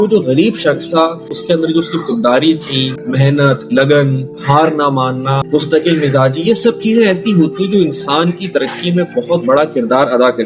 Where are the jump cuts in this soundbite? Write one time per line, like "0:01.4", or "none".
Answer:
0:01.3
0:03.0
0:05.4